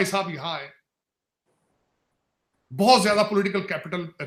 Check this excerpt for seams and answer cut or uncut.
uncut